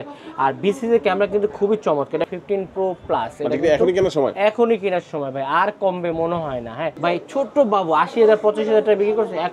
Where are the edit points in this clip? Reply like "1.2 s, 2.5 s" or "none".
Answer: 2.3 s, 7.0 s